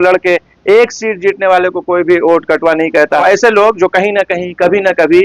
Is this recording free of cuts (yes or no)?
no